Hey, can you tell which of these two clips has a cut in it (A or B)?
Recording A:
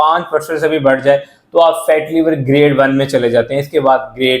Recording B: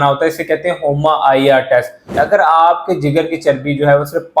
B